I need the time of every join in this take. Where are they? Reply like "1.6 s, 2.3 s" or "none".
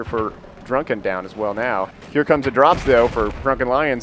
1.3 s